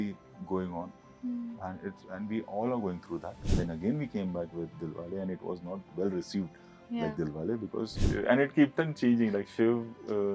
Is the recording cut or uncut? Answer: cut